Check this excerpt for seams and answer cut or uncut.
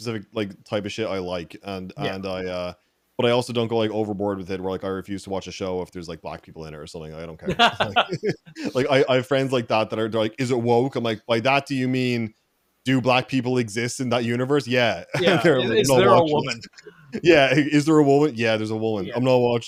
uncut